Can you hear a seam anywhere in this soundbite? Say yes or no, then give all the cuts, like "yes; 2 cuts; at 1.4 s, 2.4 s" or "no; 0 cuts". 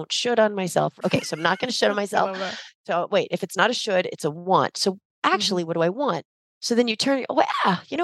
no; 0 cuts